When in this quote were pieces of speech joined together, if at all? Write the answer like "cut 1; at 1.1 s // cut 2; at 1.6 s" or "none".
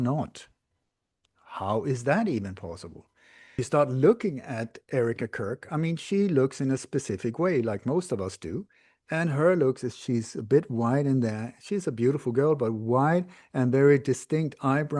cut 1; at 3.6 s